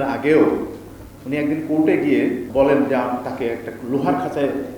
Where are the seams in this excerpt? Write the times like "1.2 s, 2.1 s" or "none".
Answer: 2.5 s